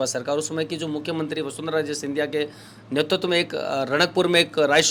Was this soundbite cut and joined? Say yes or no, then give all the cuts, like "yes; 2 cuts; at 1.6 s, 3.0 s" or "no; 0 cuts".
no; 0 cuts